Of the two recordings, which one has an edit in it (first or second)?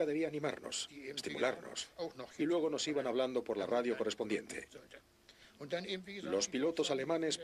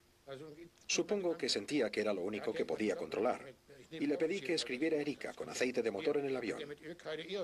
second